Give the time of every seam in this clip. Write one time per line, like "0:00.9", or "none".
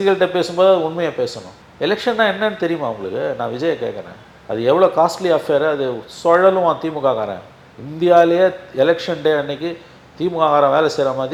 none